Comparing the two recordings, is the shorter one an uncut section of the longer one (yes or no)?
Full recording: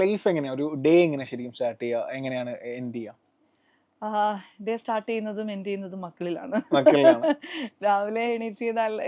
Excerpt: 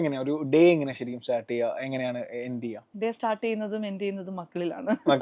no